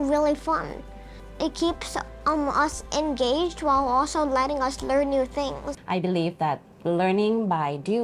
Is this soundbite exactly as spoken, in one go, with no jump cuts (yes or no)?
no